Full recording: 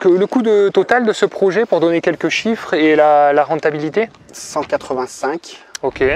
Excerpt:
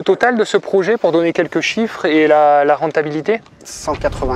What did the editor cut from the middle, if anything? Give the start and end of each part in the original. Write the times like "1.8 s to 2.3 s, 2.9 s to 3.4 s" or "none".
none